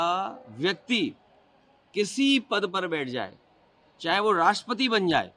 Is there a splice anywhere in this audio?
no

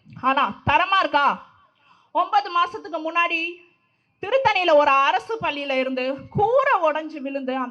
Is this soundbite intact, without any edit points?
yes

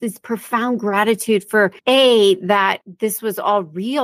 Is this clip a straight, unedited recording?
no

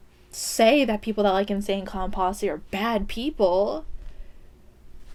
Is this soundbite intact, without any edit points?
yes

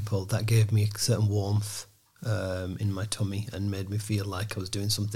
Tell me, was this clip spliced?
no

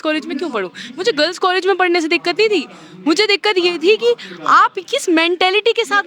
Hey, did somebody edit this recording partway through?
no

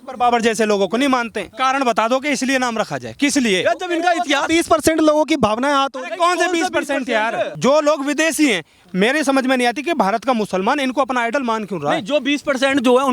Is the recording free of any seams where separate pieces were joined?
no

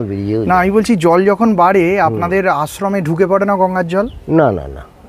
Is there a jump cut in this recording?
no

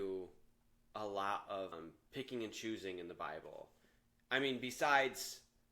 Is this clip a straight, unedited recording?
no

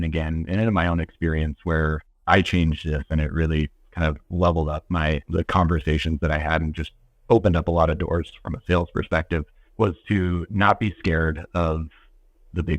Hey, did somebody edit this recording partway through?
yes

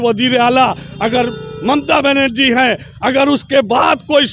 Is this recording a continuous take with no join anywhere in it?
yes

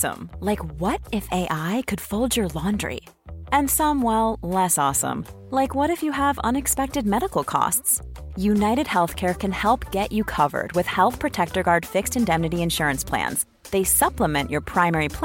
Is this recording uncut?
yes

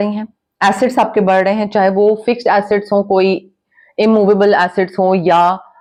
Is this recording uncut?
yes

